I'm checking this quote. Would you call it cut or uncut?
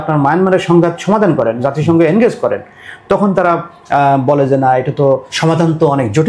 cut